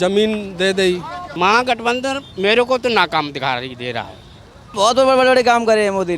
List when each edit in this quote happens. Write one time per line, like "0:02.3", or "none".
0:01.2
0:04.7

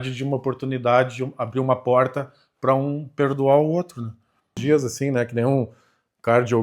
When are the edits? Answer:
0:04.6

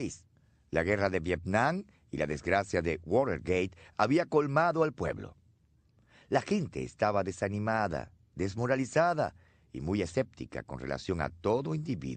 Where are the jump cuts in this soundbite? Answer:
none

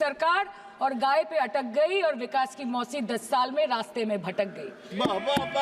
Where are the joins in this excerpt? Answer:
none

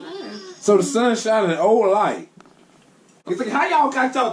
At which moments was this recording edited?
0:03.2

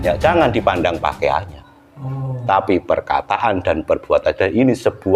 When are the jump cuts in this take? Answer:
none

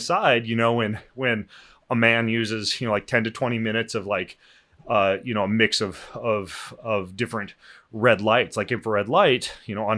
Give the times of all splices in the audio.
none

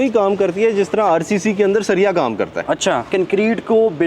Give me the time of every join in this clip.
0:03.1

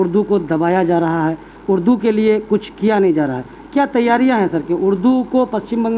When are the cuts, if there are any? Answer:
none

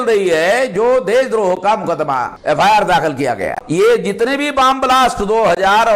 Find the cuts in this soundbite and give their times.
0:02.3
0:03.6

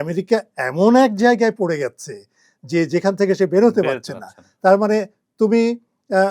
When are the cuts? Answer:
none

